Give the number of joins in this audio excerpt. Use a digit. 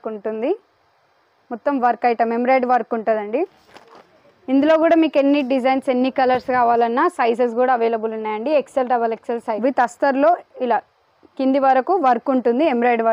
2